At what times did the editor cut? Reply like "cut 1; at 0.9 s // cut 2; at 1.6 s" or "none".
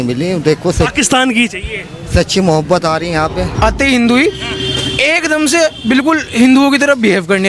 cut 1; at 3.5 s